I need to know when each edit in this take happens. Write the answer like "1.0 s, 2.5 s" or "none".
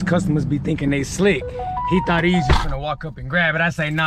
none